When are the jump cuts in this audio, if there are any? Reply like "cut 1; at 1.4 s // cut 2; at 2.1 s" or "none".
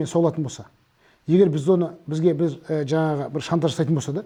none